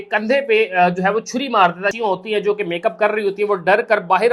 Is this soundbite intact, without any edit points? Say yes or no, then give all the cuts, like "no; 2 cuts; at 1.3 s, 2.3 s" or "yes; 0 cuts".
no; 1 cut; at 1.9 s